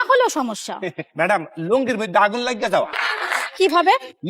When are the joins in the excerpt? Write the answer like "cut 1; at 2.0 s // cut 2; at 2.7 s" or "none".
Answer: cut 1; at 2.9 s